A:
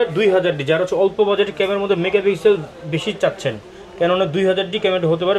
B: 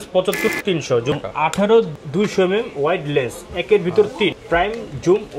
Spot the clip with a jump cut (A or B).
B